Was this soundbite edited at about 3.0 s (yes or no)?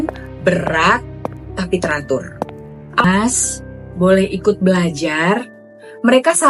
yes